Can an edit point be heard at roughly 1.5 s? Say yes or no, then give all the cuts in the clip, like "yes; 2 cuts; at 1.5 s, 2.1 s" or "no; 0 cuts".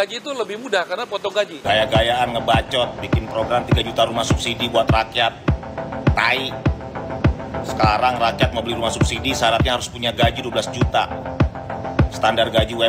yes; 1 cut; at 1.5 s